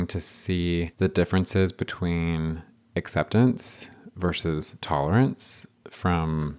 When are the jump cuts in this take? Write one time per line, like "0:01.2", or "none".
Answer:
0:00.9